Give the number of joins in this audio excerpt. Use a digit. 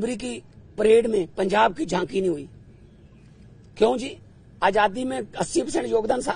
0